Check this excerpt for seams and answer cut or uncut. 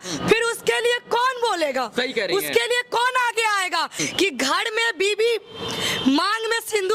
cut